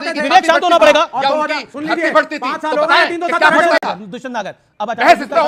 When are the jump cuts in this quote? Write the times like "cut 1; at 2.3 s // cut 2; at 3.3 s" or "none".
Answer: none